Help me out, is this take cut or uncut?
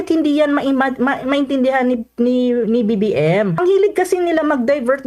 cut